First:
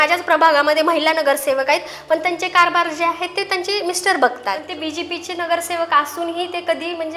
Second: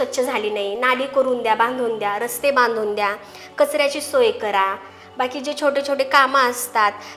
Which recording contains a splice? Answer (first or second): first